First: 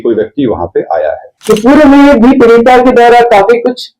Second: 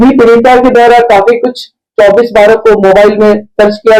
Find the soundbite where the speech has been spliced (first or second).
first